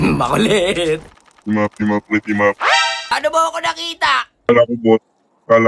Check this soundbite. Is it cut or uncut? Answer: cut